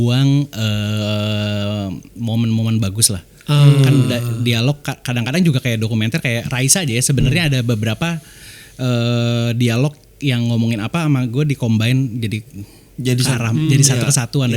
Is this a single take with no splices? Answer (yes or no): yes